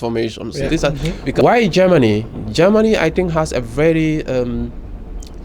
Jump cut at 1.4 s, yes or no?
yes